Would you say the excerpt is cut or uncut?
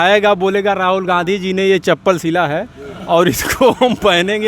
uncut